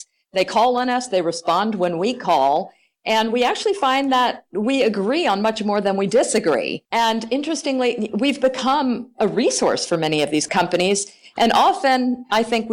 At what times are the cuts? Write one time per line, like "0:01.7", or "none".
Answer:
0:06.8
0:10.5